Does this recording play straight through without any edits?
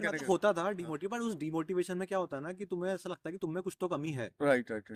yes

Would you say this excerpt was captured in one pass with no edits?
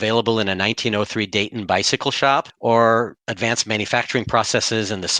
no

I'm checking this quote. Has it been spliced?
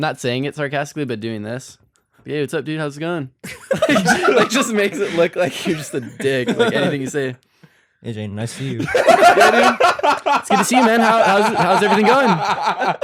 no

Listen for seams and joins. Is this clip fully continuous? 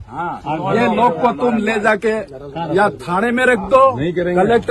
yes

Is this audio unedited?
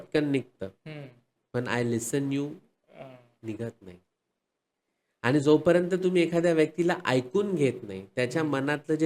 yes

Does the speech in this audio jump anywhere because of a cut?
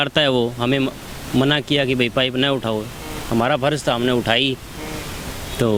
no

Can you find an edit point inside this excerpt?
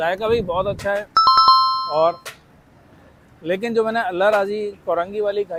no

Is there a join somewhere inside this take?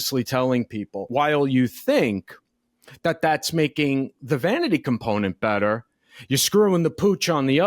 yes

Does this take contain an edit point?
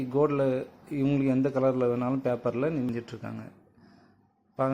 yes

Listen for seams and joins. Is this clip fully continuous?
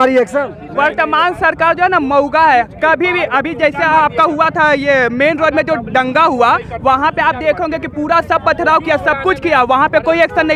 yes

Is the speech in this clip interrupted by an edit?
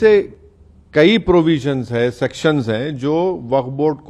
no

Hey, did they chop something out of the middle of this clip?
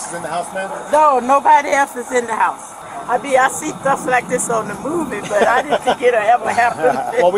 yes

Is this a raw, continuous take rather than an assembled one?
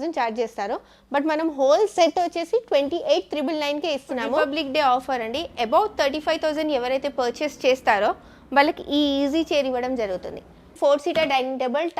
no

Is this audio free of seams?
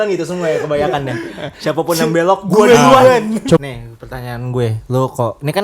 no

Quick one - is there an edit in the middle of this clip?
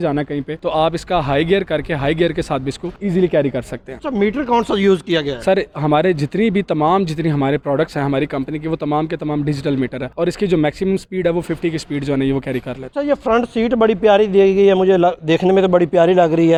no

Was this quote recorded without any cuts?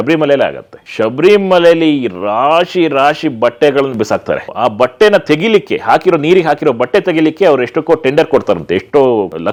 yes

